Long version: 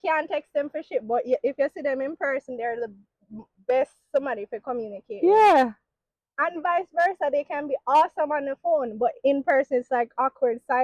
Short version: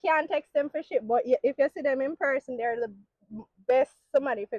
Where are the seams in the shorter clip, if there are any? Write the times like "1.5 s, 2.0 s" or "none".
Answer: none